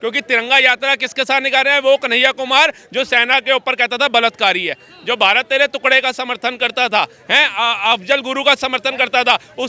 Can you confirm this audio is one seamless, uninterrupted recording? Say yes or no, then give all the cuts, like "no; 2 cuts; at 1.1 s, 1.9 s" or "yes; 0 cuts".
yes; 0 cuts